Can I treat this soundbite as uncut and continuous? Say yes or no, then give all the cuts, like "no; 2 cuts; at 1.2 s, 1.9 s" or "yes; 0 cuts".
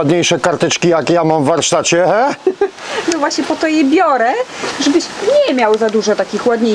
yes; 0 cuts